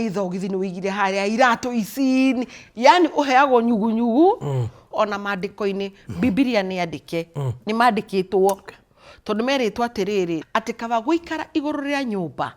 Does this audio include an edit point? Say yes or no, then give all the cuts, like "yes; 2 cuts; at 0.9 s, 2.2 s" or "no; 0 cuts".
yes; 2 cuts; at 4.9 s, 10.4 s